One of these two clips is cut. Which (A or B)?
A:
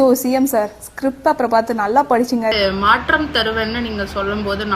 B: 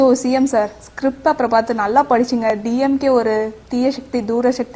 A